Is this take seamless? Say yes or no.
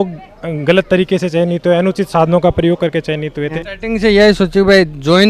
no